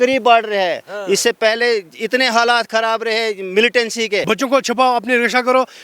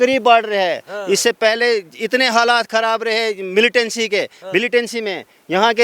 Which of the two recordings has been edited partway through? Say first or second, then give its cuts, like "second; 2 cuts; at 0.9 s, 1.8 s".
first; 1 cut; at 4.2 s